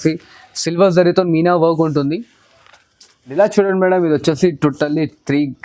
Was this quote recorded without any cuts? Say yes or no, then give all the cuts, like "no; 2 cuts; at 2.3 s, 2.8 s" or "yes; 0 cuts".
no; 1 cut; at 3.2 s